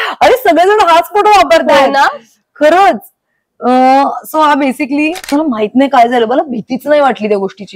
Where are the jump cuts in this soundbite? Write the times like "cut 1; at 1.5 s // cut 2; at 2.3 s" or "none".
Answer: cut 1; at 5.3 s